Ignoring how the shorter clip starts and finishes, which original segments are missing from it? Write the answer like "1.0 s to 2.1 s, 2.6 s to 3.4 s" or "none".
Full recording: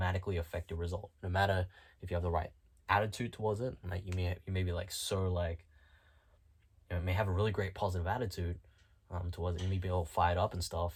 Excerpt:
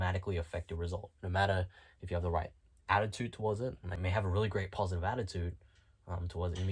4.0 s to 7.0 s